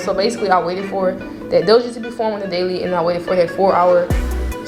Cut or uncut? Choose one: uncut